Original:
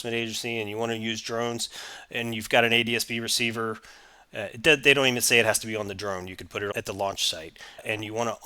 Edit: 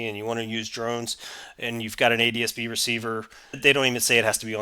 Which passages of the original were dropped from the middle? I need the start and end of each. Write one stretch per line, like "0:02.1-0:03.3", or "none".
0:04.1-0:04.8